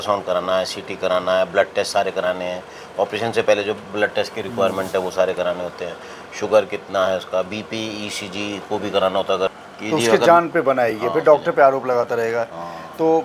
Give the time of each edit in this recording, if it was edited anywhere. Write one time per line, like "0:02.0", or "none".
0:09.5